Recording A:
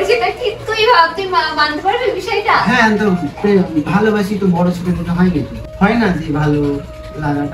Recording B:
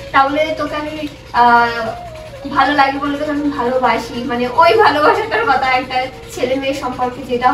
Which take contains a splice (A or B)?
A